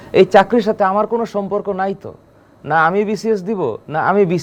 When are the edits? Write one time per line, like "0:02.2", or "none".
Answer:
none